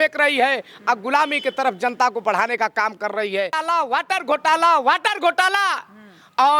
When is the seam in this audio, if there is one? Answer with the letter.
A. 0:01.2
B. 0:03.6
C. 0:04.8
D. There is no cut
B